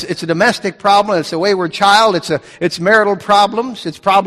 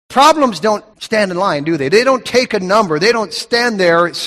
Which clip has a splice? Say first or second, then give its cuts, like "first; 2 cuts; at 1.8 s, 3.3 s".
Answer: second; 2 cuts; at 0.9 s, 3.1 s